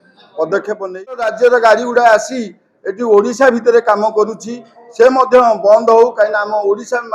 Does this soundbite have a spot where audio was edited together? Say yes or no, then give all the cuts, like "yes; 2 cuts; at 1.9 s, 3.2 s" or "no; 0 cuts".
yes; 1 cut; at 1.3 s